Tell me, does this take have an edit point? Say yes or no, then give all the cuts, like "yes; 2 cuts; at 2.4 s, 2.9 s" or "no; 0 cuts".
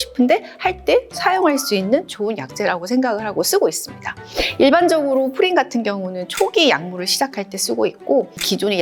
no; 0 cuts